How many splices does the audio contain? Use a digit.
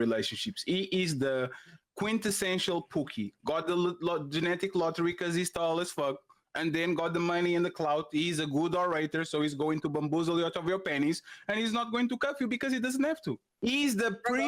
1